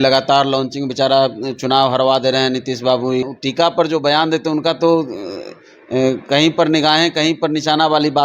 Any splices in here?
yes; 1 cut; at 3.3 s

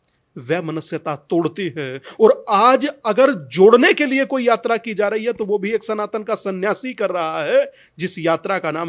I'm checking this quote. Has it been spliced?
no; 0 cuts

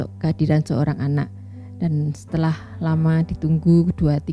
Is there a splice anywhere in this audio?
no; 0 cuts

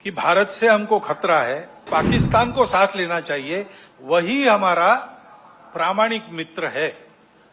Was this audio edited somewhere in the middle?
yes; 1 cut; at 1.9 s

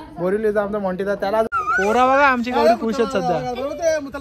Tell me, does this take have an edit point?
yes; 1 cut; at 1.5 s

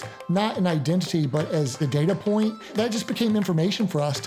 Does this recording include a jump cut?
yes; 2 cuts; at 1.8 s, 2.7 s

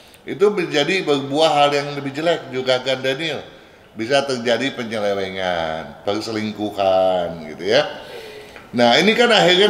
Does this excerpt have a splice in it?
no; 0 cuts

